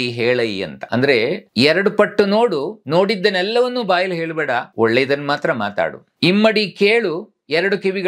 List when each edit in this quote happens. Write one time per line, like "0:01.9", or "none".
0:01.1
0:02.8
0:04.7
0:06.0